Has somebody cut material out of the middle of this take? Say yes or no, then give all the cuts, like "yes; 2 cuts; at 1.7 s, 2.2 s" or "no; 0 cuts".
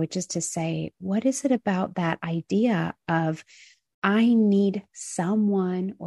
no; 0 cuts